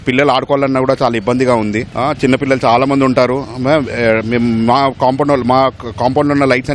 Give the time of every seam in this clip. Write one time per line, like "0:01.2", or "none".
none